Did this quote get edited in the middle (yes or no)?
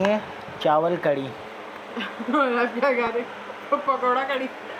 no